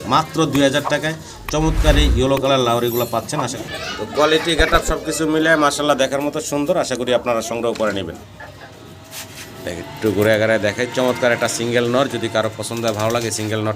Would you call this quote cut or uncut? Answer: cut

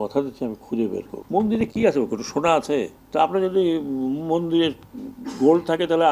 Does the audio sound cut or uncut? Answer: cut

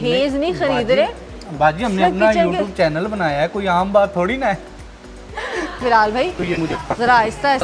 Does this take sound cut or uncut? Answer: cut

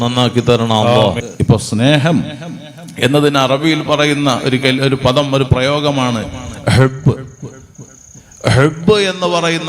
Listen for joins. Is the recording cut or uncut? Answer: cut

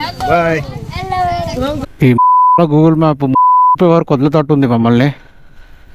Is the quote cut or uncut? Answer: cut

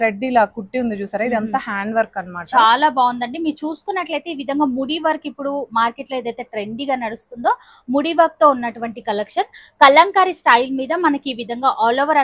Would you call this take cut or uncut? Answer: uncut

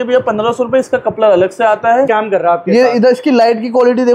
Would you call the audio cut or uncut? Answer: cut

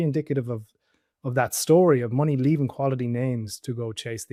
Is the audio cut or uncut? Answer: uncut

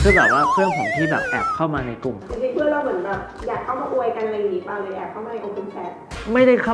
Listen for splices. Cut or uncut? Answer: cut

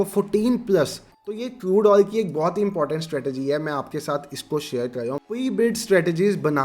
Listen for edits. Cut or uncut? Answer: cut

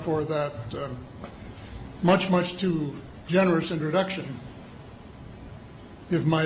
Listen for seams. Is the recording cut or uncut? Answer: uncut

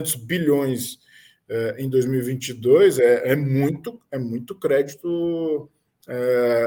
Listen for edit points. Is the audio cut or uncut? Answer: uncut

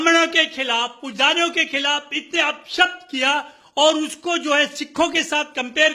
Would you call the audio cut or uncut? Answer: uncut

